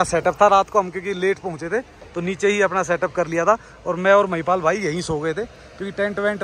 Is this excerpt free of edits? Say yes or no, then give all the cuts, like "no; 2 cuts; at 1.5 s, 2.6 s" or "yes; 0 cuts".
yes; 0 cuts